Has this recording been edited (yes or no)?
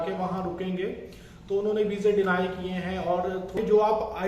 yes